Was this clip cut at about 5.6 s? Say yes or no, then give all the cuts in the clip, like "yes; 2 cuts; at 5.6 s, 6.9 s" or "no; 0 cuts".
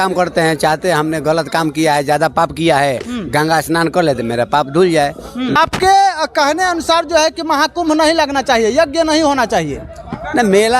yes; 1 cut; at 5.6 s